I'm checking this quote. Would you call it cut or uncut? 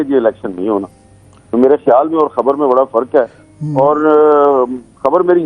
uncut